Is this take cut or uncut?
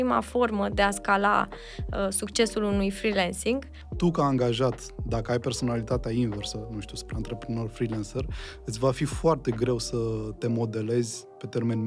cut